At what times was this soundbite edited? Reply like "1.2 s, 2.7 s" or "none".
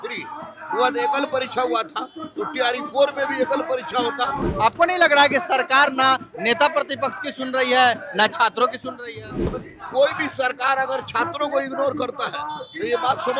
4.4 s, 9.5 s